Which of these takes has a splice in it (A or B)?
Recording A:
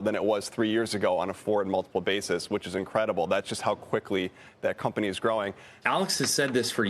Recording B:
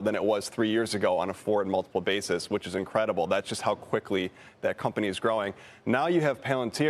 A